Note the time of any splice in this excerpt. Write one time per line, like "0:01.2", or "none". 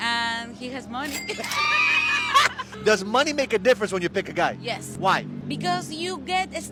none